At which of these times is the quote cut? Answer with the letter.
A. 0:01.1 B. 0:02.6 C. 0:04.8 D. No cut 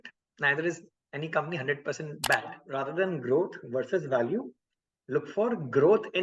B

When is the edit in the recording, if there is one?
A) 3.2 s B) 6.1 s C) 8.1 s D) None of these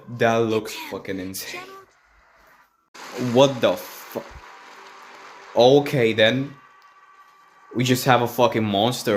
A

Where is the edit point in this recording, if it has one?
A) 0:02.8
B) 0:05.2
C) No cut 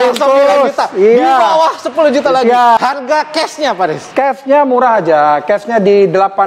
A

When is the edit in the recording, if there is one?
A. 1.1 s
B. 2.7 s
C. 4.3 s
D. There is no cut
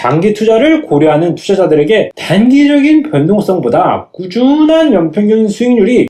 D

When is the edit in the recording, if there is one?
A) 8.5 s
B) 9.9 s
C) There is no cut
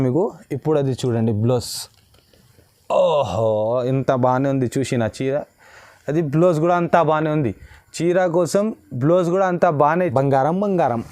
B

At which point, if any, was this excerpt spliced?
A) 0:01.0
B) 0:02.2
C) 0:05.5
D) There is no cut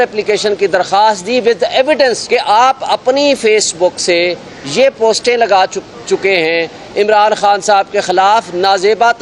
B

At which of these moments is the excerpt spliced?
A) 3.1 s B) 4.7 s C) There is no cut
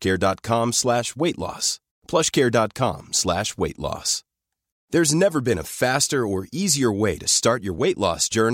B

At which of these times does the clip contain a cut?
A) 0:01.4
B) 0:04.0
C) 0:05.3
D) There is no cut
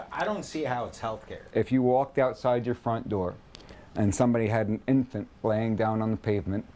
A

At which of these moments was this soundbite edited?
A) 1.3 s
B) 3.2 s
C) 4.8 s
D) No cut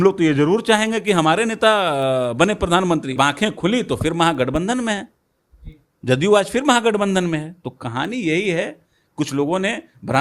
B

